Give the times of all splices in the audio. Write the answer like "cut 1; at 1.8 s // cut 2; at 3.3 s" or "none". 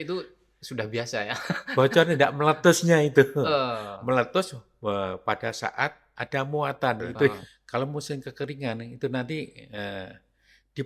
cut 1; at 7.5 s